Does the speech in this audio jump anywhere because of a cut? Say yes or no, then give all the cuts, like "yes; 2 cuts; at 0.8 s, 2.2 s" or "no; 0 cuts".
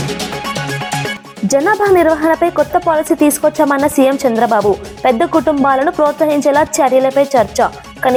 no; 0 cuts